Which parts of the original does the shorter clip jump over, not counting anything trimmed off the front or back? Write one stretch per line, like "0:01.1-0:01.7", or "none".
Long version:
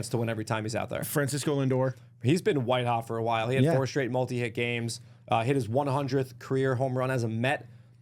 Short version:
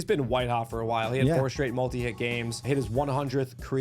0:05.0-0:05.4